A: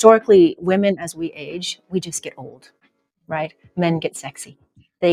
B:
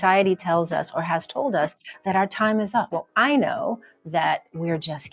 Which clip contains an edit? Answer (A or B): B